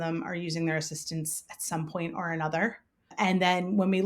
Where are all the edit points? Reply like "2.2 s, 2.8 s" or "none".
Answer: 3.1 s